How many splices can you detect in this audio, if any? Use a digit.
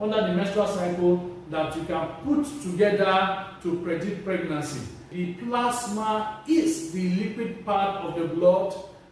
1